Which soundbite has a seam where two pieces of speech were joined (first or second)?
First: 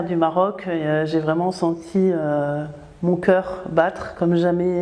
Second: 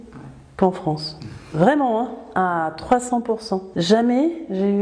second